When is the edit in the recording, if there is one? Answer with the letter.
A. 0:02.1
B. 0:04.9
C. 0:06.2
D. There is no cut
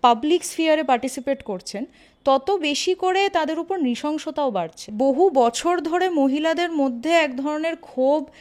B